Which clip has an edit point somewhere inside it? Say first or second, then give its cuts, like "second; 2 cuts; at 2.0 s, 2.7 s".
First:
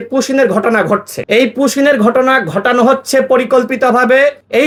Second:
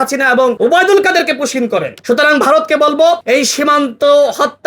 second; 1 cut; at 2.0 s